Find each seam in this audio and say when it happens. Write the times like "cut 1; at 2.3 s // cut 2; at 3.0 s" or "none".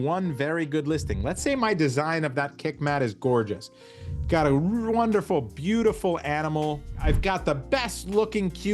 cut 1; at 7.0 s